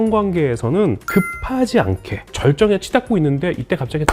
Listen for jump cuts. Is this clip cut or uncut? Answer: cut